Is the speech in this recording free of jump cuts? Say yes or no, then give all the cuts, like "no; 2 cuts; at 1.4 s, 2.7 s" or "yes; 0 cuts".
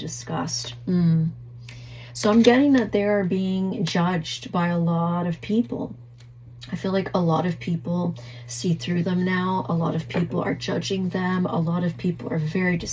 yes; 0 cuts